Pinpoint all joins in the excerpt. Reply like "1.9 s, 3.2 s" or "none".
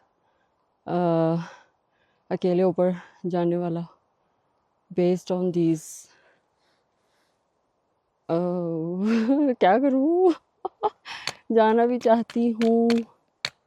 none